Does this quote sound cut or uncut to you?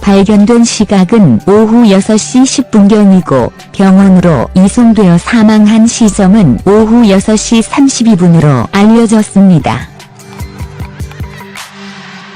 cut